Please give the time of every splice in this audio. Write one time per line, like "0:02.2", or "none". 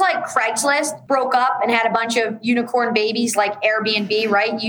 0:01.0